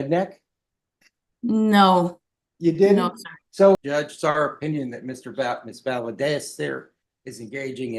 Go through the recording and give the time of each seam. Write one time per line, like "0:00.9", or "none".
0:03.8